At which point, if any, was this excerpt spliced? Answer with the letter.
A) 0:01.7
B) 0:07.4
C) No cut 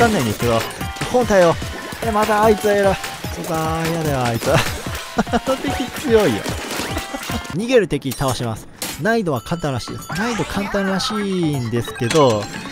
B